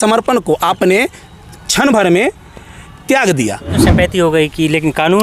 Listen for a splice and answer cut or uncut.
cut